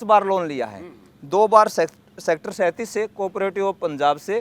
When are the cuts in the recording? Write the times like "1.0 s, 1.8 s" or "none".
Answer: none